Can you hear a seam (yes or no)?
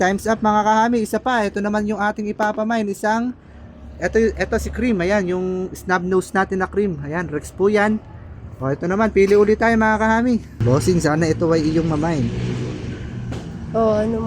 yes